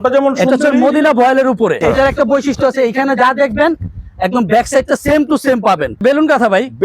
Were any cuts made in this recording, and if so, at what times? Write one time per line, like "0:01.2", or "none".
0:01.8
0:06.0

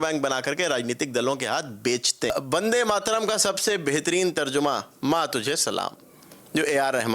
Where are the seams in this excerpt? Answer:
0:02.3

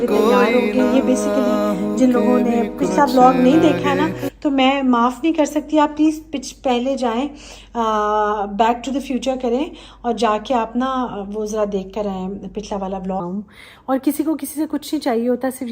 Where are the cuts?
0:13.2

